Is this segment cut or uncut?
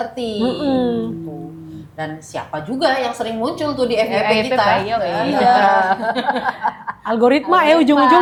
uncut